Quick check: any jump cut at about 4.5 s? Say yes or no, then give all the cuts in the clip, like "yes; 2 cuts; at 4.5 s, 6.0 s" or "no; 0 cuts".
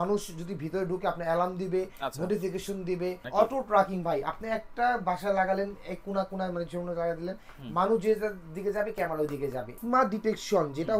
no; 2 cuts; at 3.2 s, 9.7 s